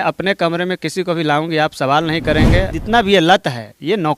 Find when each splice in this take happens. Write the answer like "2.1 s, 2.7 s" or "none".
2.7 s